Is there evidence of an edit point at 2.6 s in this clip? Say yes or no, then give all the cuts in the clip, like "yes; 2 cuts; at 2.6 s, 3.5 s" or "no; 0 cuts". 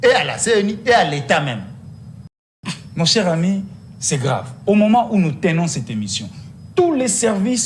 yes; 1 cut; at 2.6 s